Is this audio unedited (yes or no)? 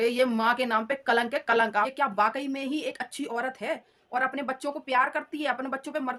yes